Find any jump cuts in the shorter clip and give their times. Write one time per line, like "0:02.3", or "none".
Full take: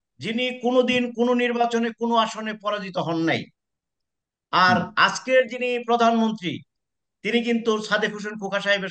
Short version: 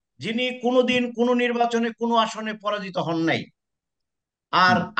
none